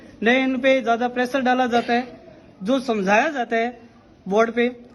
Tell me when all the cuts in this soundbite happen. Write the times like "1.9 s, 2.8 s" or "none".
none